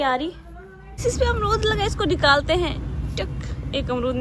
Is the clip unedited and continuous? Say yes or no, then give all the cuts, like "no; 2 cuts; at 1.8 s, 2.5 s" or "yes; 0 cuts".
no; 1 cut; at 1.0 s